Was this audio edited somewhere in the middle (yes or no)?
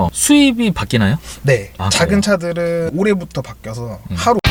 no